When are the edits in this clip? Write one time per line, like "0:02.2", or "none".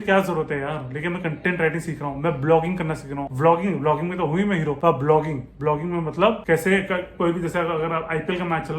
none

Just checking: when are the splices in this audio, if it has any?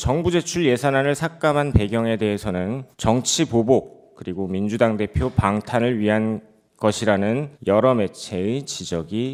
none

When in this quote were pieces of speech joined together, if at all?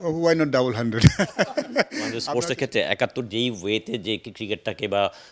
0:02.2

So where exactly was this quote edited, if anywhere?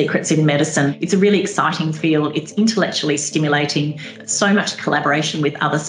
0:00.9
0:04.2

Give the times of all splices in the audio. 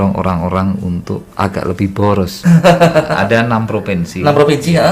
0:02.4

